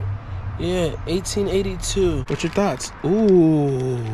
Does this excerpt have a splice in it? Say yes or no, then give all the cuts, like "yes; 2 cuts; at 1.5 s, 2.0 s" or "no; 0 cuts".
yes; 1 cut; at 2.3 s